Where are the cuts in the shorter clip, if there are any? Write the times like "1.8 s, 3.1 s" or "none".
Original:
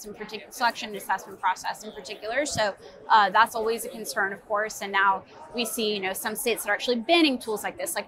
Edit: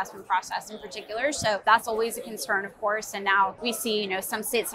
1.6 s, 3.6 s

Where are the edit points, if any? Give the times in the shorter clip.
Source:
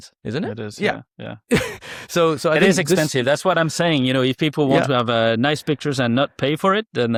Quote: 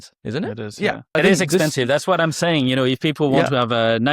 1.1 s

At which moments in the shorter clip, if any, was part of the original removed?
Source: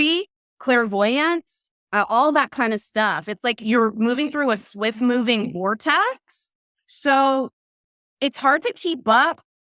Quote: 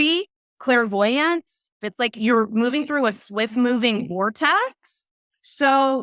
1.8 s

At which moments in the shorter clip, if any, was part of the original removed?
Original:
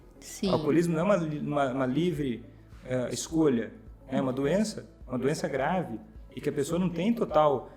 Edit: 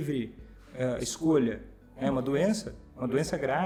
none

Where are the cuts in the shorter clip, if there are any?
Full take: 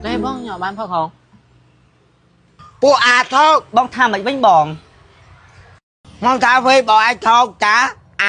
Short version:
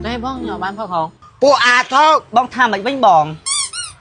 1.2 s

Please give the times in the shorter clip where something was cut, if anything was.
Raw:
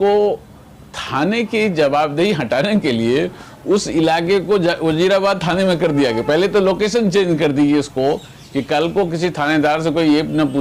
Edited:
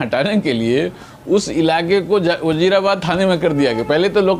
none

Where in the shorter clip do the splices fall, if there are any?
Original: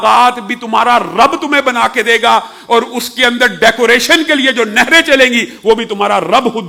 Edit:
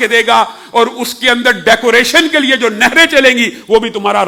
none

